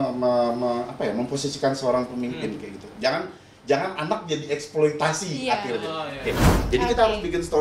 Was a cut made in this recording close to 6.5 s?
yes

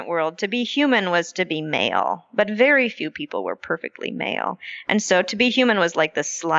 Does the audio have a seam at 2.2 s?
no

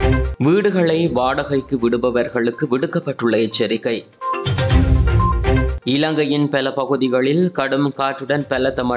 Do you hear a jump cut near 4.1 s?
no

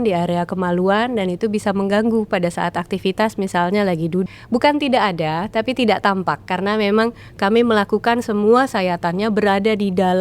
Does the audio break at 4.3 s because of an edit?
yes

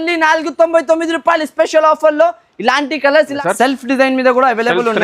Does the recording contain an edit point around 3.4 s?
yes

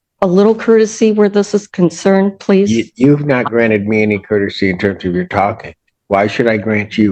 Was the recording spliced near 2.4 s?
no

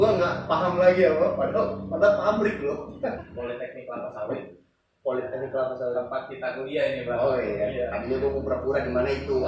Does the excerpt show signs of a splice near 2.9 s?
yes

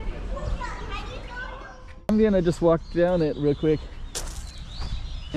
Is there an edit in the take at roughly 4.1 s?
no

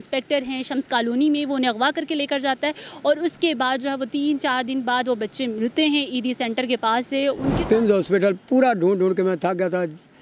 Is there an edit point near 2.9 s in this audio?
no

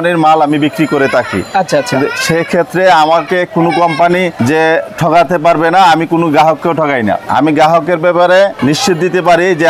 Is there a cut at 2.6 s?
no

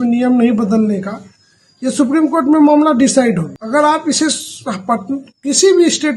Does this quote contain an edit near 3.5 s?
yes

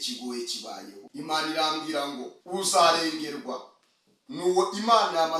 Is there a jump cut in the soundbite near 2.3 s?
yes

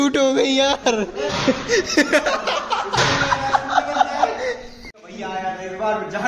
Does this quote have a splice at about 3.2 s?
no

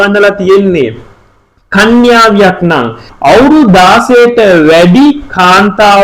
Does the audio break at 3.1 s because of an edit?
yes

